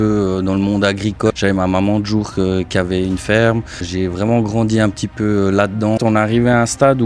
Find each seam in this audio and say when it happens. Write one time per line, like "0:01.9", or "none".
0:01.3
0:03.8
0:06.0